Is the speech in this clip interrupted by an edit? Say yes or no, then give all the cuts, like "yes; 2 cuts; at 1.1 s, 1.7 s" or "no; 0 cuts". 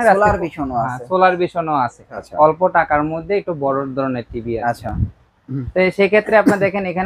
yes; 1 cut; at 2.2 s